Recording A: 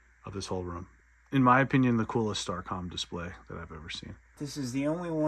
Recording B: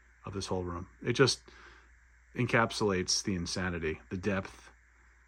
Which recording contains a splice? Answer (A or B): A